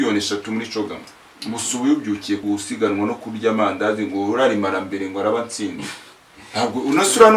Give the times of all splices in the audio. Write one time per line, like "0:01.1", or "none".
0:02.4